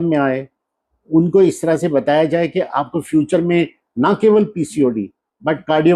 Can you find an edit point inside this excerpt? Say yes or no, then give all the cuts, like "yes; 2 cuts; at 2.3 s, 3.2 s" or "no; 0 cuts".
no; 0 cuts